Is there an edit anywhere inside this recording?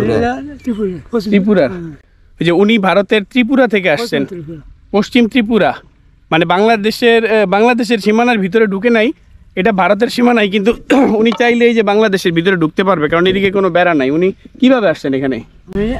no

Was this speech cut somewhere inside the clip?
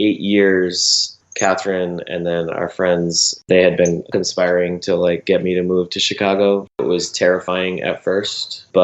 yes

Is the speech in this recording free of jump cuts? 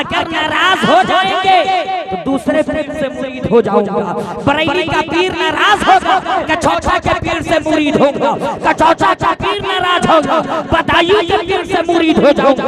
no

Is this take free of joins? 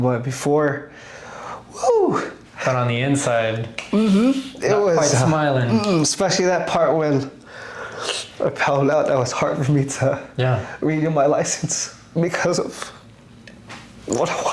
yes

